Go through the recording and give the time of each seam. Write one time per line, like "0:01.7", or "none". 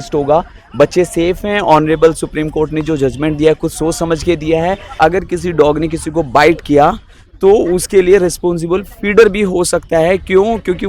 0:05.0